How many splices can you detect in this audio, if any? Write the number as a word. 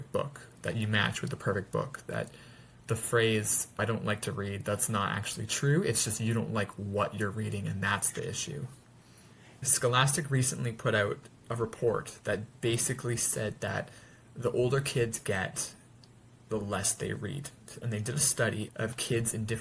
two